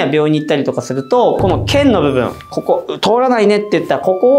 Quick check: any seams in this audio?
no; 0 cuts

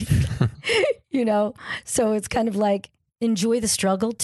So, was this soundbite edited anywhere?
yes; 1 cut; at 3.0 s

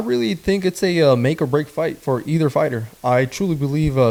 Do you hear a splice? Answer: no; 0 cuts

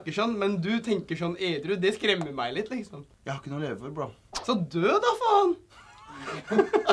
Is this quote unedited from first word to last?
no; 2 cuts; at 3.1 s, 4.3 s

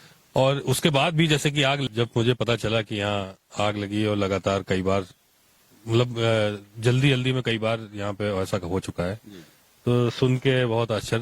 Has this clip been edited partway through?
yes; 1 cut; at 1.8 s

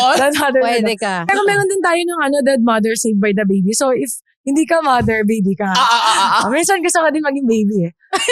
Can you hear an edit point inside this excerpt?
yes; 1 cut; at 1.3 s

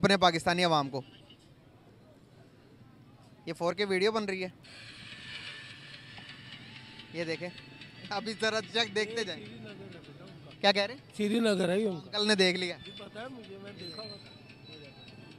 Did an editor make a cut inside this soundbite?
no; 0 cuts

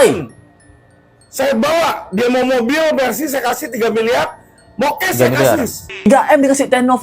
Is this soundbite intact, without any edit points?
no; 1 cut; at 5.8 s

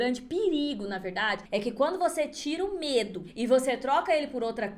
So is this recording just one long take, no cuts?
no; 1 cut; at 1.4 s

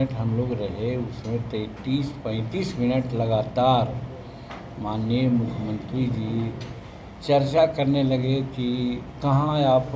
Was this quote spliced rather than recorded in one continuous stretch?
no; 0 cuts

